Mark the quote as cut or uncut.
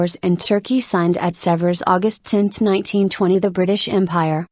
uncut